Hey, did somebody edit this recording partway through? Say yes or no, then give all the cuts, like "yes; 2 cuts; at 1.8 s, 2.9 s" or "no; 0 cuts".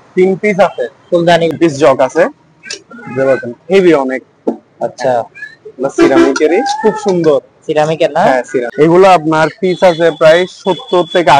yes; 2 cuts; at 1.5 s, 8.7 s